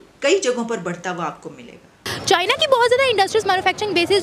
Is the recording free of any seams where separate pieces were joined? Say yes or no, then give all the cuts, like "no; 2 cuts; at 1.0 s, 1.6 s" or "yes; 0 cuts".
no; 1 cut; at 2.1 s